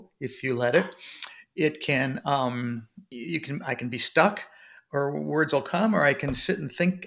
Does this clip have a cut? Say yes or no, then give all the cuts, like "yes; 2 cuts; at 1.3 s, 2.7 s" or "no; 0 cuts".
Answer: yes; 1 cut; at 3.0 s